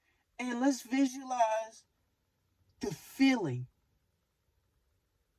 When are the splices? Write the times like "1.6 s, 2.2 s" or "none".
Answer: none